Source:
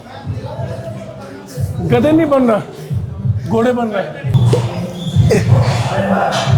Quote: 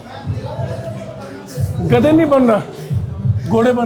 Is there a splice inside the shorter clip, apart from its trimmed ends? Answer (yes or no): no